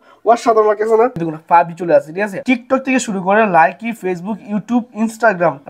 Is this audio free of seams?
no; 2 cuts; at 1.2 s, 2.4 s

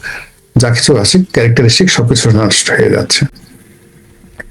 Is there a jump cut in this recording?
no; 0 cuts

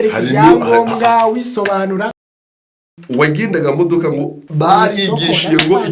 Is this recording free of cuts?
no; 2 cuts; at 2.5 s, 4.4 s

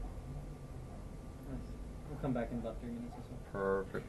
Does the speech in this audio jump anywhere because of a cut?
yes; 1 cut; at 2.7 s

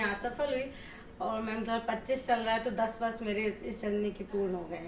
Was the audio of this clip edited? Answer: no; 0 cuts

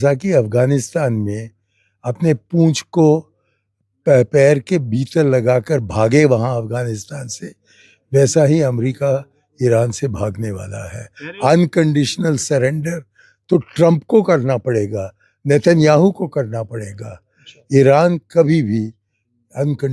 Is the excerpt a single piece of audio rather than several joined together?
yes; 0 cuts

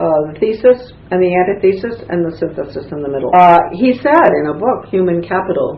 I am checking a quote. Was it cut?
no; 0 cuts

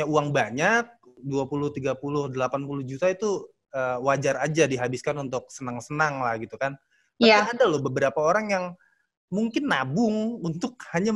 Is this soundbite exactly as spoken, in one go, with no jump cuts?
no; 1 cut; at 1.2 s

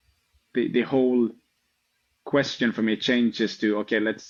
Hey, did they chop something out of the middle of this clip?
no; 0 cuts

